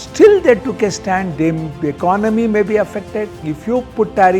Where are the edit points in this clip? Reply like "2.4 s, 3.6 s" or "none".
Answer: 3.5 s